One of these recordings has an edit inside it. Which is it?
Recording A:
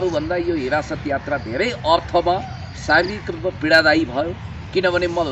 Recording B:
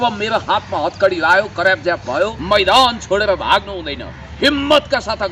B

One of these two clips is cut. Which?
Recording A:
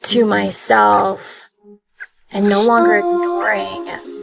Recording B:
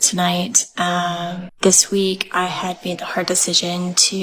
B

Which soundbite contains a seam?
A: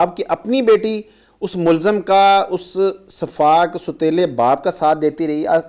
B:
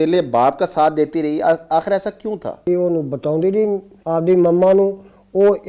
B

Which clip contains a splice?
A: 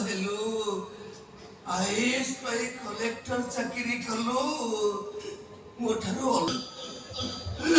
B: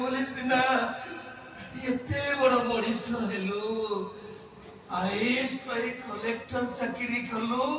A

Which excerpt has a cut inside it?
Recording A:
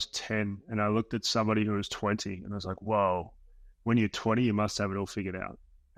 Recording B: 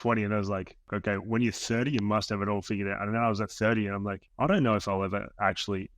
B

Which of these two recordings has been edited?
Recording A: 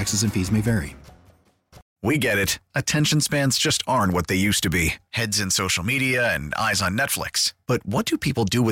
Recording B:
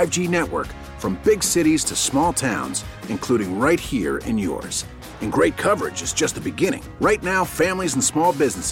A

